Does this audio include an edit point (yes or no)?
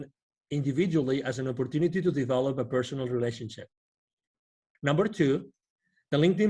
yes